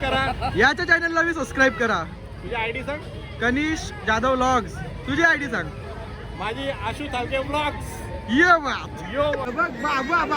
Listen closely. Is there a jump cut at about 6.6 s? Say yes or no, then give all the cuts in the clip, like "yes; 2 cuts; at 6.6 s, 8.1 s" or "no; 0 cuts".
no; 1 cut; at 9.4 s